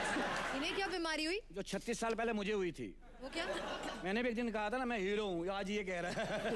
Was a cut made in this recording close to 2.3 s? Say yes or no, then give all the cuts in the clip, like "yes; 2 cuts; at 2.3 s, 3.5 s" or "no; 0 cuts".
no; 1 cut; at 4.0 s